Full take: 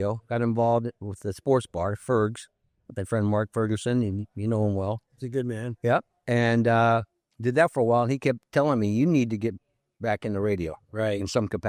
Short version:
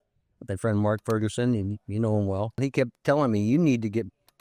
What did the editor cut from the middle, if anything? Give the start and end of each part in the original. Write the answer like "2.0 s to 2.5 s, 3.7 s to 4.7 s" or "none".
5.1 s to 8.1 s